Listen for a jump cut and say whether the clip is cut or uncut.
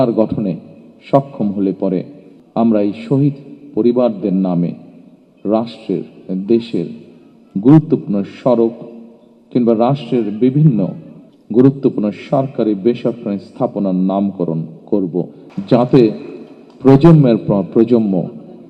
cut